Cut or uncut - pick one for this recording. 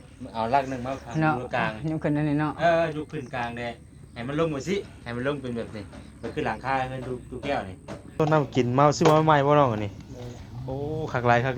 cut